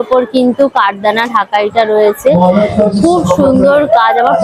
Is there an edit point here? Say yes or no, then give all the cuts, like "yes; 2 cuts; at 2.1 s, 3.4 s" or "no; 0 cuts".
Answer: no; 0 cuts